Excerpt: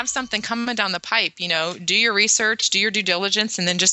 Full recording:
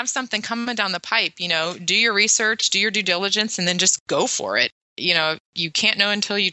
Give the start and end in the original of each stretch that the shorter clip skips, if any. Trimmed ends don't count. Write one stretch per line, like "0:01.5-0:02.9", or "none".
none